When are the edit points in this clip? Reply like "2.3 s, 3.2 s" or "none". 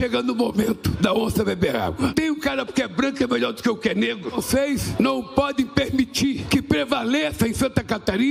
none